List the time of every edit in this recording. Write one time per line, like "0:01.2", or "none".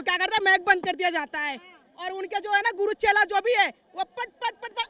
none